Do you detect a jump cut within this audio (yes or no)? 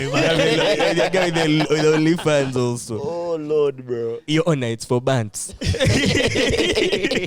no